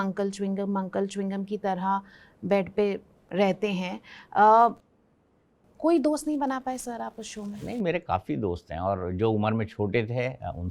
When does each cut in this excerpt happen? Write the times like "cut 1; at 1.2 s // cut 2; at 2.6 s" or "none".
none

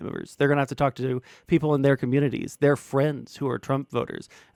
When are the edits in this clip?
none

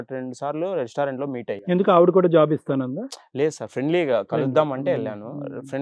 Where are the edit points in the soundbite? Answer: none

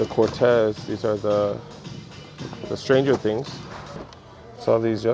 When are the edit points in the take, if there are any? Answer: cut 1; at 4.1 s

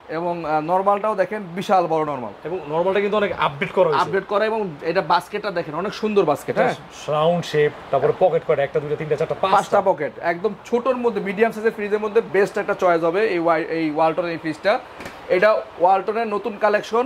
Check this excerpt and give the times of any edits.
none

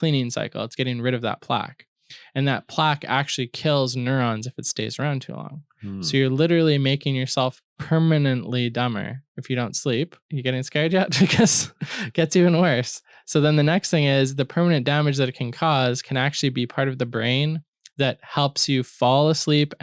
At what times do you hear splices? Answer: none

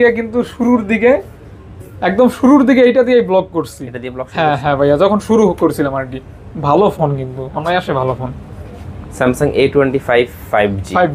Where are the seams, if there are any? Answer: none

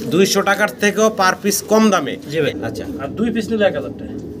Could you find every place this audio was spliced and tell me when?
cut 1; at 2.5 s

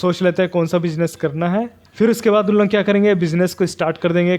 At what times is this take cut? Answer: cut 1; at 1.8 s

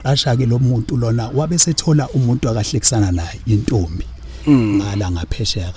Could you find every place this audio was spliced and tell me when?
none

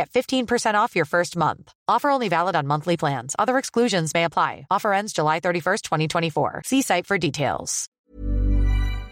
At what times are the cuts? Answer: cut 1; at 7.9 s

